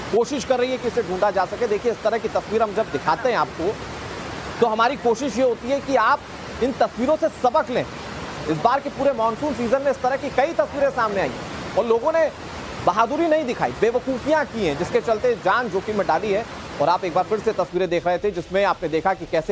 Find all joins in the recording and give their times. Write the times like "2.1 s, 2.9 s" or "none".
none